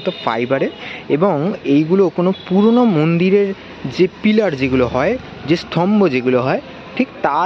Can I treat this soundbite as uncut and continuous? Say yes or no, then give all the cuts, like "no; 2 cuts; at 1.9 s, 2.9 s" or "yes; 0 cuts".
yes; 0 cuts